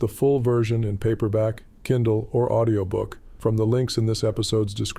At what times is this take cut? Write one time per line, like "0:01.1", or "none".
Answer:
0:03.2

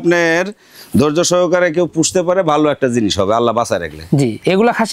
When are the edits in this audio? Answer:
none

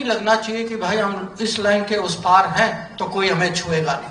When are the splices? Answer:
none

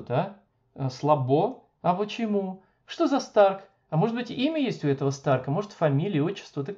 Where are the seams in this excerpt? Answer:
none

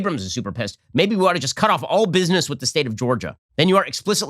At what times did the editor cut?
0:03.4

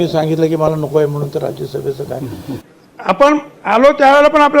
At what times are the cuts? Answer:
0:02.6

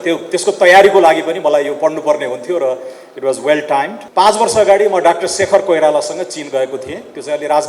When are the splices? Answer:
0:04.0

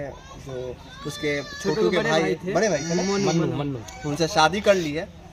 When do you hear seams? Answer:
none

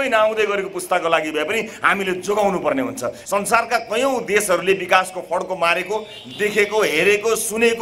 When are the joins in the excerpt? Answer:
0:03.2

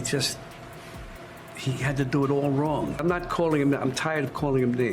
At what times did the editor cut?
0:02.9

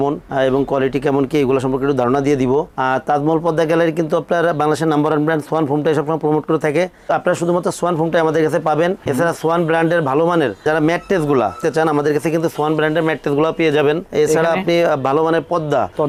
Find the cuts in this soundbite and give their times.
none

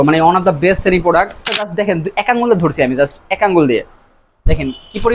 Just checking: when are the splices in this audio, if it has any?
0:01.7

